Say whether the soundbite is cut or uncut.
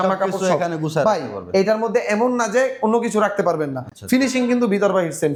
uncut